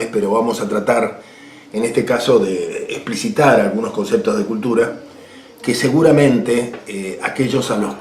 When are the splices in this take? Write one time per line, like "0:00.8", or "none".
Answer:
none

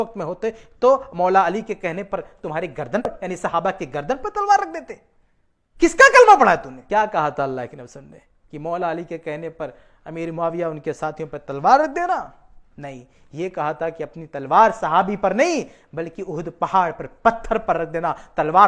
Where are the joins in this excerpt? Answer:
0:03.1
0:06.7

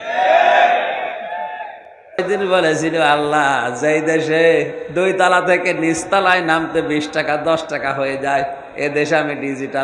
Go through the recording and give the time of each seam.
0:02.2

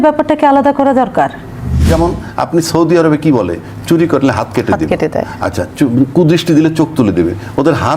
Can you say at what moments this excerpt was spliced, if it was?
0:01.8

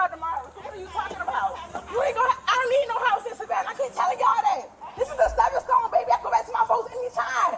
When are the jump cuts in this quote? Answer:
none

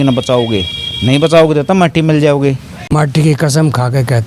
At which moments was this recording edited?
0:02.9

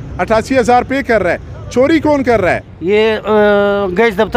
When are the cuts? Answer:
0:02.7

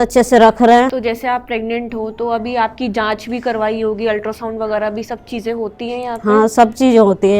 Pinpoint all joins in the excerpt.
0:01.0

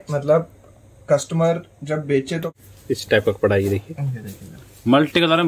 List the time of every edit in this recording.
0:02.5

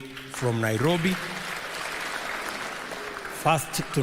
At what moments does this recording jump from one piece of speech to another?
none

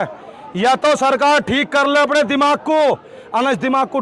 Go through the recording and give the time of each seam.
none

